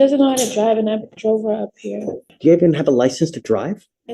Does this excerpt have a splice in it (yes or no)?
yes